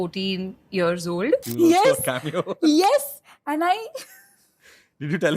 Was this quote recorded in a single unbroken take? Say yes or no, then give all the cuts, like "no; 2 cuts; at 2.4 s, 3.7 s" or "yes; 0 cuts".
no; 1 cut; at 1.4 s